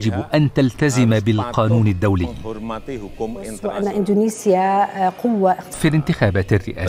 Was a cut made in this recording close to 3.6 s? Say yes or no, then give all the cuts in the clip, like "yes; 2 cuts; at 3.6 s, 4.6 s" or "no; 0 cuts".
yes; 1 cut; at 3.6 s